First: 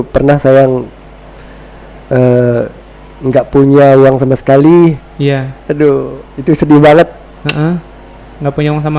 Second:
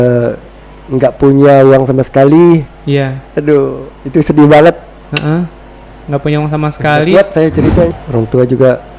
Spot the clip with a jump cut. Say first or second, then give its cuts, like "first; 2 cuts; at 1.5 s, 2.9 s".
second; 1 cut; at 8.0 s